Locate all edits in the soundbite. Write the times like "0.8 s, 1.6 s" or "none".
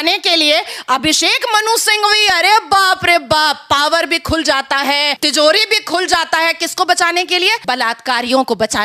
5.2 s, 7.6 s